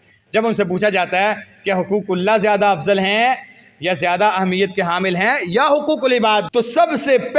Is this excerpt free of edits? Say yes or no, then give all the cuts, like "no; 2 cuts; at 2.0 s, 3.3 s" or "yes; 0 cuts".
no; 1 cut; at 6.5 s